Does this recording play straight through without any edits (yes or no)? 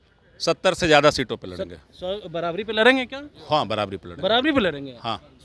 yes